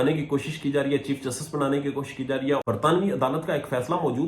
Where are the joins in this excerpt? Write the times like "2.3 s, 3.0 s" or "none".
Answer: 2.6 s